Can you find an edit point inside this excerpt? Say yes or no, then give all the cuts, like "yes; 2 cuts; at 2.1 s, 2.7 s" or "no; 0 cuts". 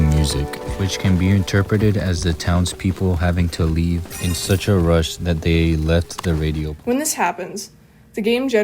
yes; 1 cut; at 6.7 s